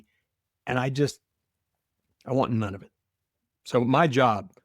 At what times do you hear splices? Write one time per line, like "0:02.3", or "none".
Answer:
0:01.3